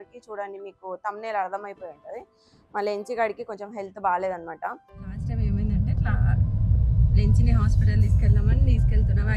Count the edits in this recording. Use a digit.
1